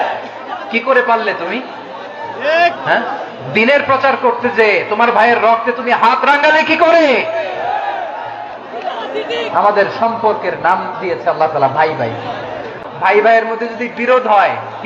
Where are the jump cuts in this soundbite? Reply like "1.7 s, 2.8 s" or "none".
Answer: 12.7 s